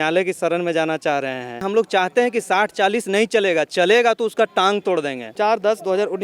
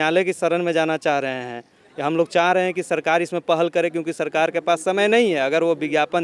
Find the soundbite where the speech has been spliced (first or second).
first